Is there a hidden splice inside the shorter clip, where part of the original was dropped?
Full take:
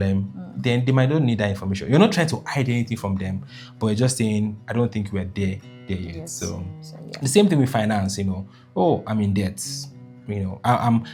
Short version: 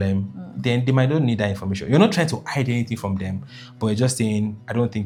no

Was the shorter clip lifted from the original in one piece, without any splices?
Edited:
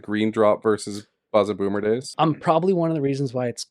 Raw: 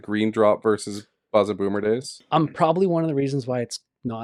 no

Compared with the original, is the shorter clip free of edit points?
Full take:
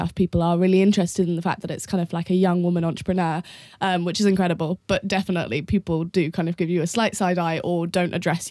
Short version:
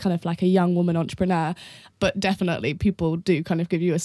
no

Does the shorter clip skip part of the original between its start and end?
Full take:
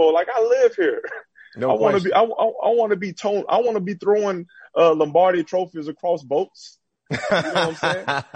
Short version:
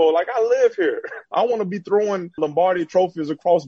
yes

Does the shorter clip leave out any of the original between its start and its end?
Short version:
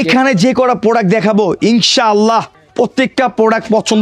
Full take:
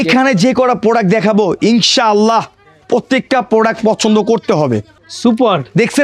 yes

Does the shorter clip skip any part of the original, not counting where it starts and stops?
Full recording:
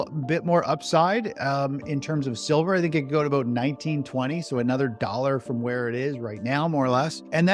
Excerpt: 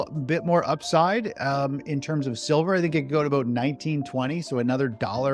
no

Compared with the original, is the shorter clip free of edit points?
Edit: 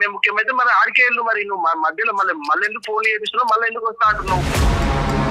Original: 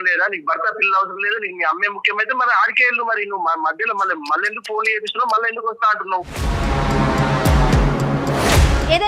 yes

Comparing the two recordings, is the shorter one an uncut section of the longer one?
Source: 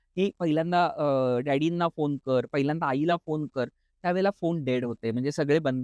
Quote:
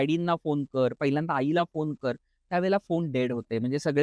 yes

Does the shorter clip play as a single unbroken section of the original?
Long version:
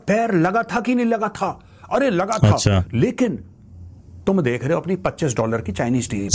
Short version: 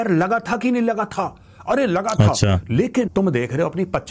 no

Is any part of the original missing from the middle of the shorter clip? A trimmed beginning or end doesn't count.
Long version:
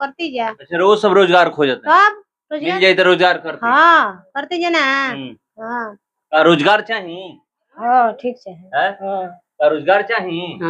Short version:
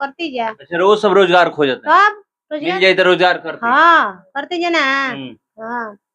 no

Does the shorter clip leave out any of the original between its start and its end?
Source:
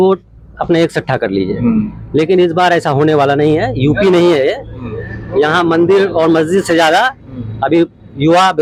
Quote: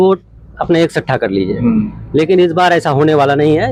no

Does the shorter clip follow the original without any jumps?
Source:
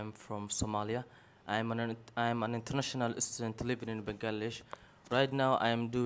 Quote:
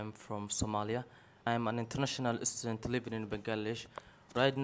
no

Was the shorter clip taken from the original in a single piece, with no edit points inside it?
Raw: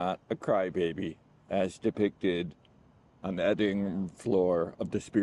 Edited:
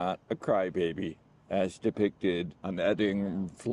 no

